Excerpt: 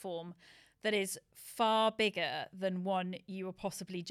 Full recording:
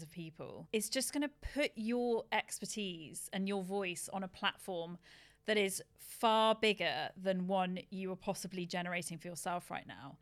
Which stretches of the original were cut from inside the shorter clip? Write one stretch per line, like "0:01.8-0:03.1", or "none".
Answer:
none